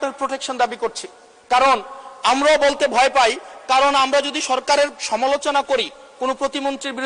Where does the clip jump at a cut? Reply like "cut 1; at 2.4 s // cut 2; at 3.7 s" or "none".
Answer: none